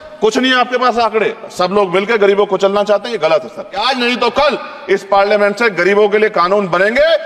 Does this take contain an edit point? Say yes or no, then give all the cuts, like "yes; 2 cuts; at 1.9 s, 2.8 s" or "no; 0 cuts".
yes; 1 cut; at 3.8 s